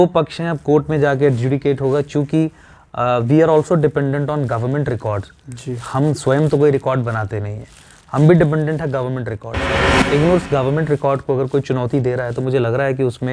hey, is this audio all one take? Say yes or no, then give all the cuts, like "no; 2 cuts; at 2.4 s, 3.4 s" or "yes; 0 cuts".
yes; 0 cuts